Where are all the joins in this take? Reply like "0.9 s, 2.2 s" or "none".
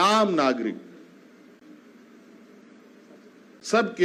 none